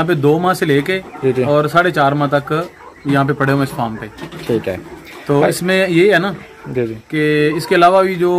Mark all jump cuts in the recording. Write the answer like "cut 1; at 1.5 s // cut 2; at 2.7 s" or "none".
none